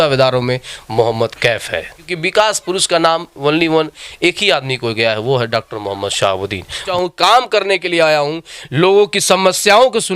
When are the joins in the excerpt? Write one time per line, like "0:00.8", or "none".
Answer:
0:02.1
0:06.9